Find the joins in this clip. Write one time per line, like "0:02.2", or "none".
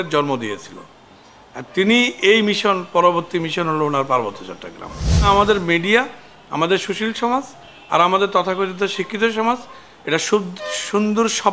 0:05.2